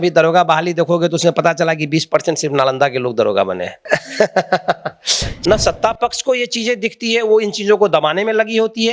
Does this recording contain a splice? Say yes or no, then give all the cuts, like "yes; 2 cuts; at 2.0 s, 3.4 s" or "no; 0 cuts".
yes; 2 cuts; at 3.8 s, 5.2 s